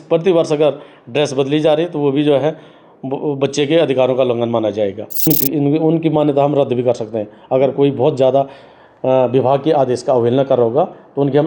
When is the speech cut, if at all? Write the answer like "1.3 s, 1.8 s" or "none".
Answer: 5.3 s

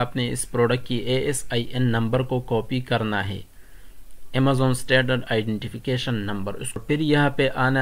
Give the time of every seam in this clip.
none

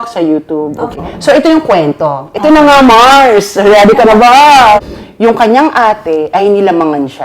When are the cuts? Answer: 1.0 s, 4.9 s

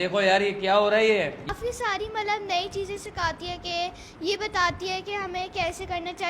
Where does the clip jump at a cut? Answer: 1.5 s

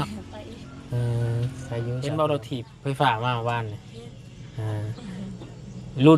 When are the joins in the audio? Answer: 2.0 s

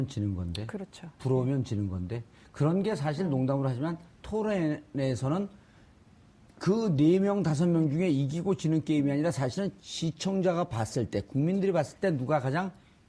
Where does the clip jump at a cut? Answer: 3.7 s

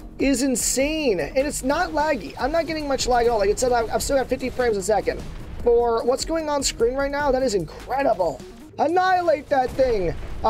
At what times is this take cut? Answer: 8.6 s

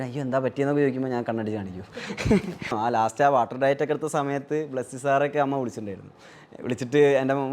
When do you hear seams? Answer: 2.7 s

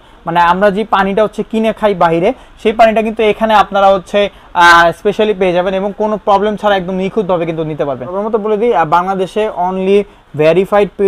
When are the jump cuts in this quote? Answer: 8.2 s

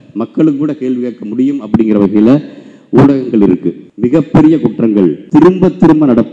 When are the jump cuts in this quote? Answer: 3.8 s, 5.2 s

